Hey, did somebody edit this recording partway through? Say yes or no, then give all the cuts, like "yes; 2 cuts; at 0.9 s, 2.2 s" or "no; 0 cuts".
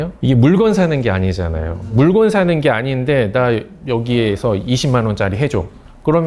no; 0 cuts